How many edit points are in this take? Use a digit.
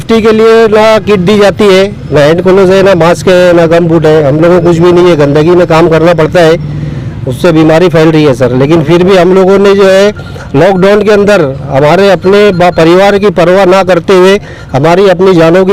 0